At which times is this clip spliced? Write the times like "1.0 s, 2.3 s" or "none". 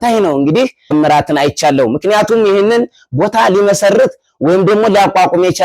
0.9 s